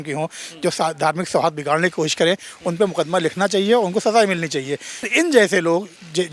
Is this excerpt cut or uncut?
cut